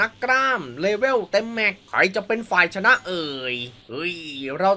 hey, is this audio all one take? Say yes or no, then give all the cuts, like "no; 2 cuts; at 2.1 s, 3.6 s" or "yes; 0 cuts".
yes; 0 cuts